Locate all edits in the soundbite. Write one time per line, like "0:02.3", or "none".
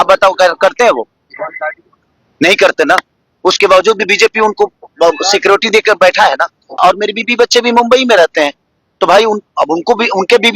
0:06.8

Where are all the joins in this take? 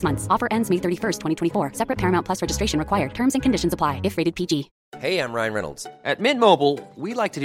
0:04.8

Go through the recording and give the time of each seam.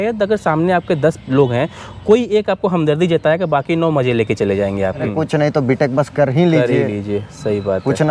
0:05.1

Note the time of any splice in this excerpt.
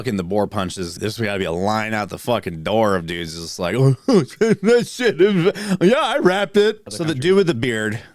0:00.9
0:06.9

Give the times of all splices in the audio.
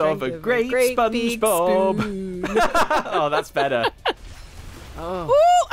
0:04.2

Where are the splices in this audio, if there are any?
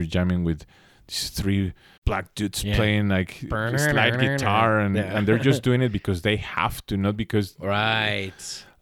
0:01.9

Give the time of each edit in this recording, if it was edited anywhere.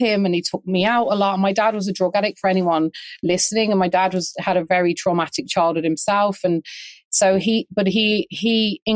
none

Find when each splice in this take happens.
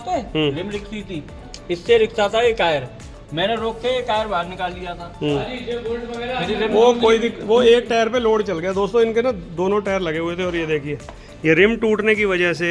none

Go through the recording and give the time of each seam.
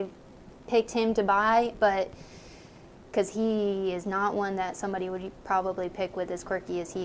none

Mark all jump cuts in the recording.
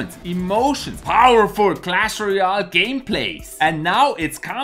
none

